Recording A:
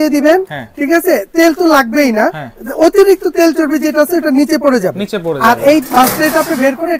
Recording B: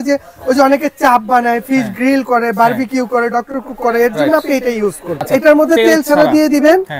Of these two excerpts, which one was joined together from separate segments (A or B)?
B